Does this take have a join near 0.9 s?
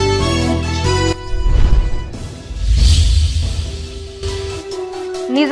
yes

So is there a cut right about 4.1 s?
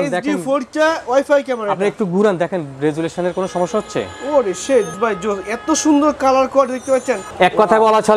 no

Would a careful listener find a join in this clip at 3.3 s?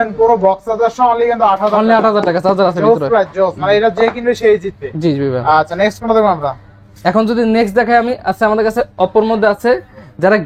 no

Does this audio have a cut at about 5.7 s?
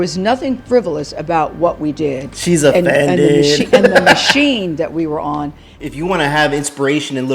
yes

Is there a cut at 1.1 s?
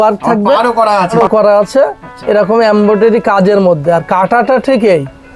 yes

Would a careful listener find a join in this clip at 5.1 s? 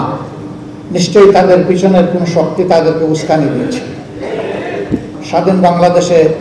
yes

